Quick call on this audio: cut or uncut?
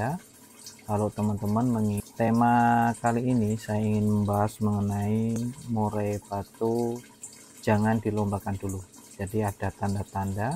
cut